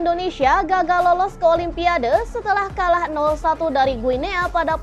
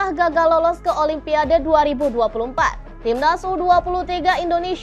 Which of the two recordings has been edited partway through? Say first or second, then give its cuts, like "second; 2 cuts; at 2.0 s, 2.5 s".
second; 1 cut; at 2.9 s